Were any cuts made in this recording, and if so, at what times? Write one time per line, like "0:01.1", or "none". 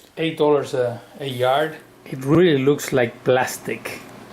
0:02.4